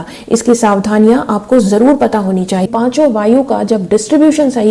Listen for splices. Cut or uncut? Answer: cut